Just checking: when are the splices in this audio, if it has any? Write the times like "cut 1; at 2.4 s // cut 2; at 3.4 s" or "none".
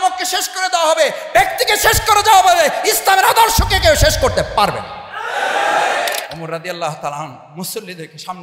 cut 1; at 6.3 s // cut 2; at 7.5 s